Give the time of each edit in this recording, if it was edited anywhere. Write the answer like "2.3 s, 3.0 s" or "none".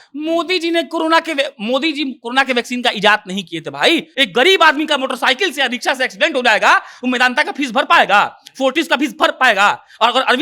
4.1 s